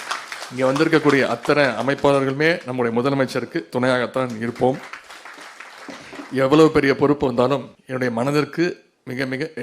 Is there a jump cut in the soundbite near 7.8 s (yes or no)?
yes